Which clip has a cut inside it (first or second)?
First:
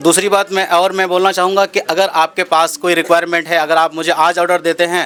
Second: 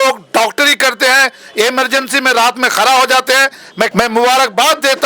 second